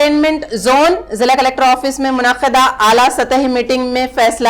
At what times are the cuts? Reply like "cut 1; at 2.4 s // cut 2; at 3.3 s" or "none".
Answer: none